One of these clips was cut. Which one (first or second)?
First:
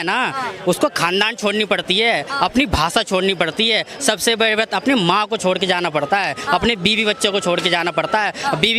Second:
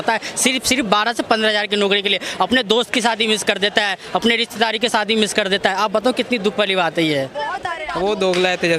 second